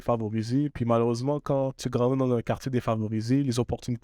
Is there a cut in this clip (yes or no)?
yes